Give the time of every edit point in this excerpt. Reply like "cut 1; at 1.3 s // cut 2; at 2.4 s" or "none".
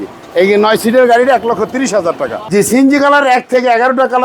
cut 1; at 2.8 s